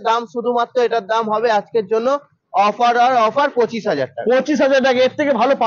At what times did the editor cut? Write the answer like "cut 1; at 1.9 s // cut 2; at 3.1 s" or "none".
none